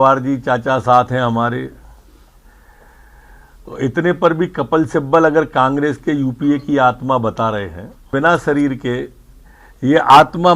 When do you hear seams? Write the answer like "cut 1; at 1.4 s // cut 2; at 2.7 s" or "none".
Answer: cut 1; at 8.1 s